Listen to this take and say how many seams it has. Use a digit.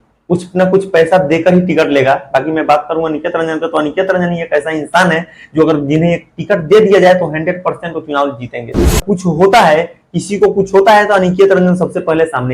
1